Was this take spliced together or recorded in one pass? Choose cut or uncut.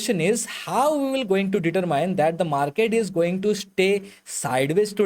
uncut